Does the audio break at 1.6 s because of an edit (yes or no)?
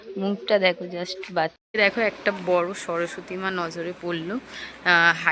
yes